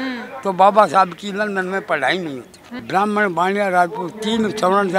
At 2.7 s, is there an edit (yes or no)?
yes